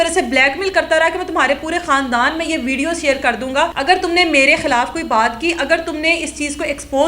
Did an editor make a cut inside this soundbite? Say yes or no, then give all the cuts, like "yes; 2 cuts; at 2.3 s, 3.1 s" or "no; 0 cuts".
yes; 1 cut; at 3.8 s